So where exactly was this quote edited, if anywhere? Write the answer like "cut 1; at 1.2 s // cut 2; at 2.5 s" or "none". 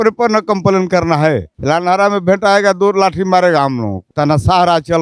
cut 1; at 4.1 s